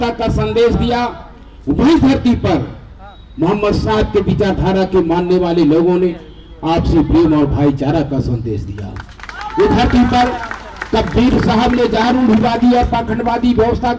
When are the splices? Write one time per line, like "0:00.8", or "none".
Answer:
none

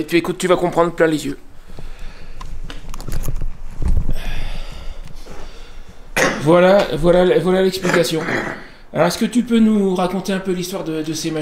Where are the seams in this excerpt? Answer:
none

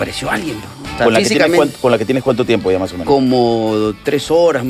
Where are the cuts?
0:00.9

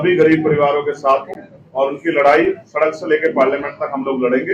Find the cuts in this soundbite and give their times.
none

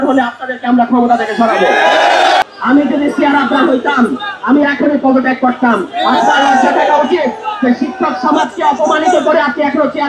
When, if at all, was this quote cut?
0:02.4

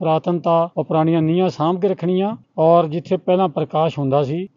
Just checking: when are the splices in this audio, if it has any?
none

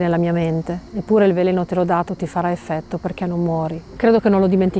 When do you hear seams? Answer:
0:03.8

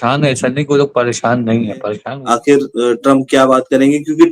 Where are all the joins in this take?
0:02.0

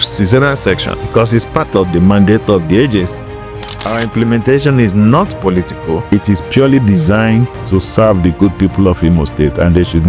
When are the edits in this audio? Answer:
0:00.9
0:03.8
0:06.0

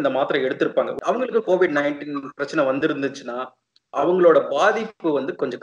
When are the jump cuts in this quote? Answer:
0:00.9

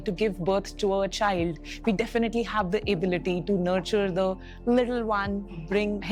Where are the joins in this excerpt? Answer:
none

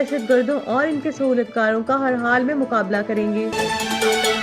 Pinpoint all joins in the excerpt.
0:03.5

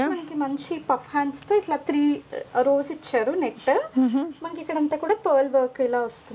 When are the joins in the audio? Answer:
none

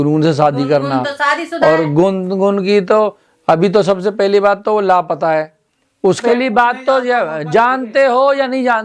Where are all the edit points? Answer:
0:06.2

